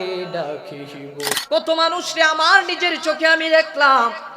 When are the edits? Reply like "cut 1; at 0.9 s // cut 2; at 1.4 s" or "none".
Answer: cut 1; at 1.3 s